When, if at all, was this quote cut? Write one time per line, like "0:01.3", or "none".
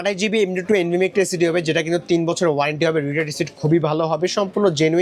none